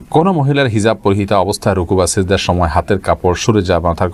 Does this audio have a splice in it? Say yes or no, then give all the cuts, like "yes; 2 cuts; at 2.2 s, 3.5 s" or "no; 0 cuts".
no; 0 cuts